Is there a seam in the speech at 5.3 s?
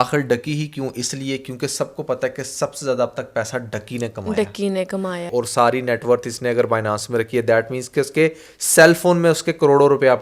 yes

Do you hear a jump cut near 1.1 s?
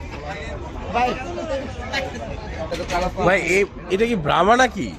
no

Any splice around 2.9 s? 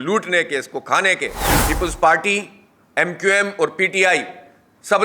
no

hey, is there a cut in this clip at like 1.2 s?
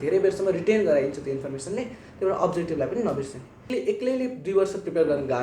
no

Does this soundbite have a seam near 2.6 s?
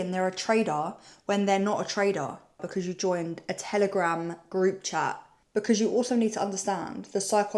yes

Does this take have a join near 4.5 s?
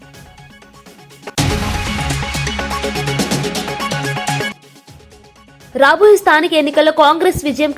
yes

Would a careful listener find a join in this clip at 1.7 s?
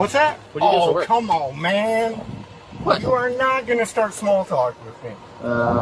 no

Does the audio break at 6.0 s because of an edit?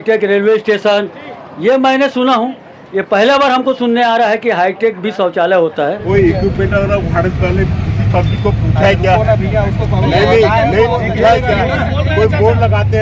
yes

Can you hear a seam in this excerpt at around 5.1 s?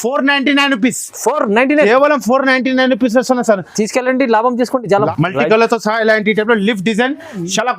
yes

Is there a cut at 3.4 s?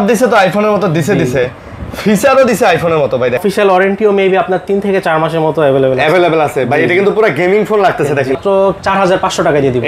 yes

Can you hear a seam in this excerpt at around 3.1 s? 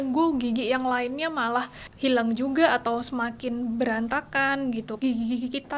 no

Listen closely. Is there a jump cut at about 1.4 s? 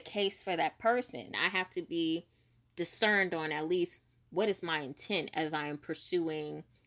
yes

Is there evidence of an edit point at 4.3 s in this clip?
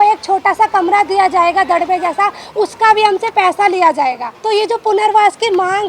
yes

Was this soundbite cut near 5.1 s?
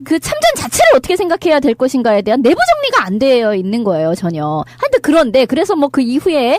yes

